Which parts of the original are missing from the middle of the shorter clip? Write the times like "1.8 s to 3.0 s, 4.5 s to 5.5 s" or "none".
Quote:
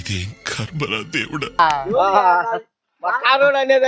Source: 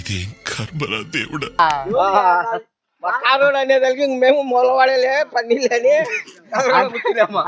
none